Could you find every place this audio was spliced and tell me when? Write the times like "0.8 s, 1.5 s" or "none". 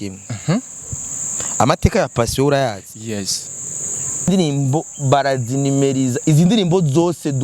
4.3 s